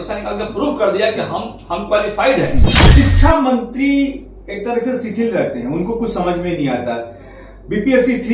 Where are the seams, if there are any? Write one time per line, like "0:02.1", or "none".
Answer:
0:02.8

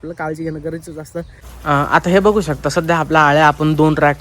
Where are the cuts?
0:01.4

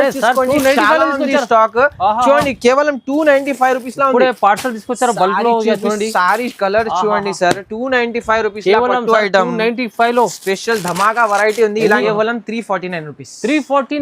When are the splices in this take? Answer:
0:12.0

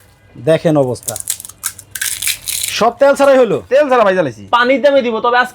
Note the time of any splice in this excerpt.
0:04.5

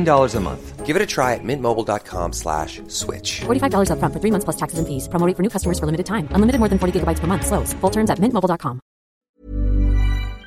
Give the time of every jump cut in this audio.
0:09.1

